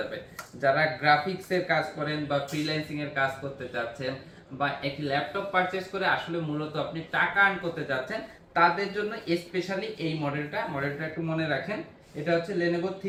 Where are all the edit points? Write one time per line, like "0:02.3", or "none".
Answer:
none